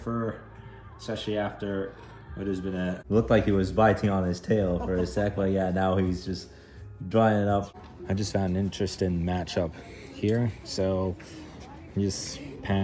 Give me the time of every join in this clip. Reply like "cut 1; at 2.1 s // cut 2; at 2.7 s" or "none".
cut 1; at 2.9 s // cut 2; at 7.7 s